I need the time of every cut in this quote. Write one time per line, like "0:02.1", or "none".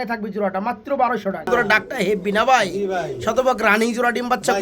0:01.5